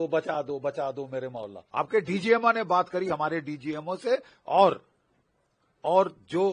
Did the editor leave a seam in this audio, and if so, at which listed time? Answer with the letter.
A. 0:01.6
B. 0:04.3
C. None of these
A